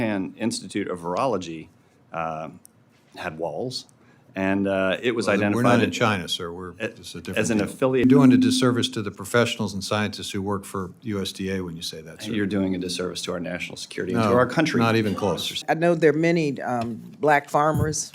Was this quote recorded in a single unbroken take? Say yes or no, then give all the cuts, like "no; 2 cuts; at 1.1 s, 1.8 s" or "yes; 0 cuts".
no; 2 cuts; at 8.0 s, 15.5 s